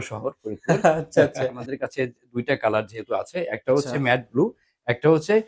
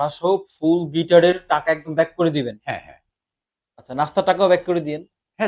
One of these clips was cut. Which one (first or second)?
first